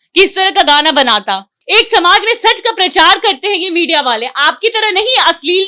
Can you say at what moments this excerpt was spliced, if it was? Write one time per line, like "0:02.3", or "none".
0:01.5